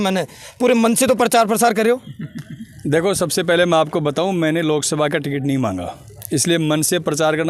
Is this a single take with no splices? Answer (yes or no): yes